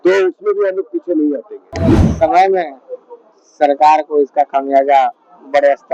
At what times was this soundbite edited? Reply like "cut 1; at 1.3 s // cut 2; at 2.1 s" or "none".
cut 1; at 1.7 s